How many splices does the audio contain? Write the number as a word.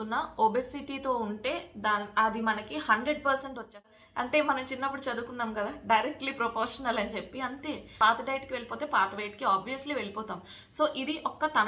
two